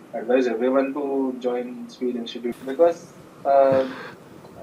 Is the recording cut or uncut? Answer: cut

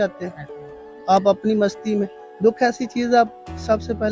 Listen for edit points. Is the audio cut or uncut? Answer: uncut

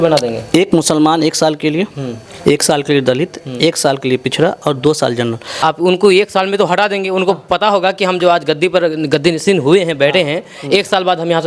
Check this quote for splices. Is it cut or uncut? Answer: cut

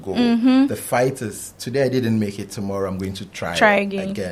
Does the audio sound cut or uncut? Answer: uncut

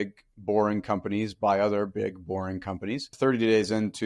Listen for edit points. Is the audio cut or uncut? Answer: cut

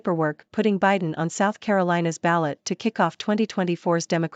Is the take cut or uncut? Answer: uncut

